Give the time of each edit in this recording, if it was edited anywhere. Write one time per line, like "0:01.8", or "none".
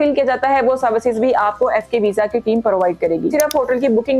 0:03.3

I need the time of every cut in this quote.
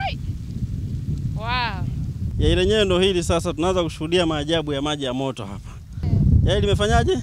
0:02.3
0:06.0

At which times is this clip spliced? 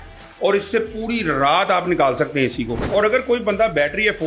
0:02.8

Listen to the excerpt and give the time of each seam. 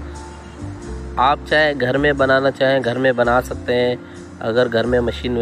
0:01.1

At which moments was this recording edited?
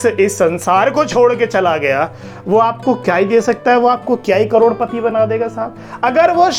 none

